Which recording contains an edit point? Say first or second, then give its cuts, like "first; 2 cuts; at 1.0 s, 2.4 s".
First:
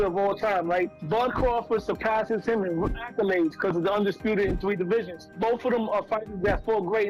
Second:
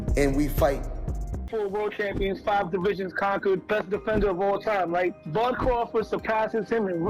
second; 1 cut; at 1.5 s